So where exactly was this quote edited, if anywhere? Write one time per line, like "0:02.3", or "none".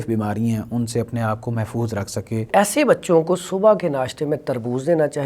0:02.5